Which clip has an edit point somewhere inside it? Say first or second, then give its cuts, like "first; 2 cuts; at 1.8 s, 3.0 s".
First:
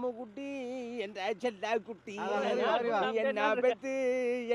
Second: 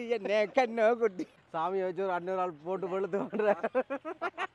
second; 1 cut; at 1.3 s